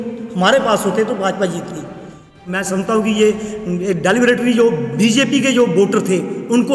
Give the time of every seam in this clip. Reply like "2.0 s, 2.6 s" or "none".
2.3 s

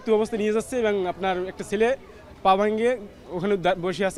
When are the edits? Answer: none

